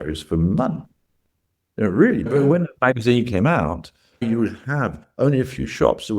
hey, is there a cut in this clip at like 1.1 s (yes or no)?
no